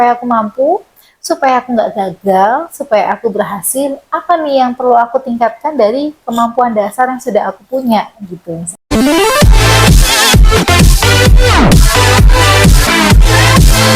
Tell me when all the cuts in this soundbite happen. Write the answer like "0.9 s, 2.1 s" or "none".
8.9 s